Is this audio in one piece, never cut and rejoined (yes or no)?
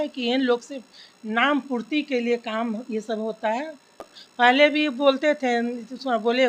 no